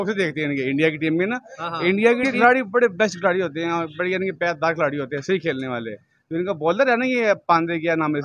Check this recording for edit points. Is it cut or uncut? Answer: cut